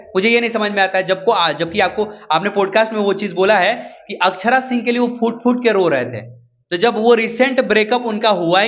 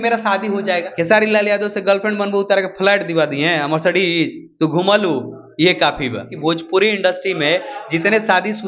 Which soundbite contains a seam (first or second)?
second